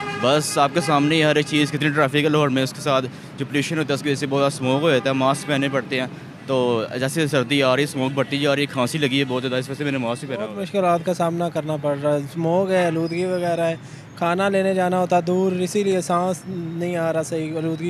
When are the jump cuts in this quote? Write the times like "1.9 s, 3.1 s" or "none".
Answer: 10.6 s